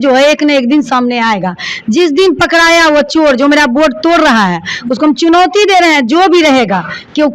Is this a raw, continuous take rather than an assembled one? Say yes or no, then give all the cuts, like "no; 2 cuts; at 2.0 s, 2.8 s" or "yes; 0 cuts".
yes; 0 cuts